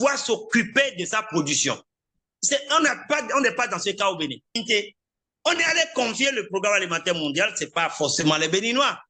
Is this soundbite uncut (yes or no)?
no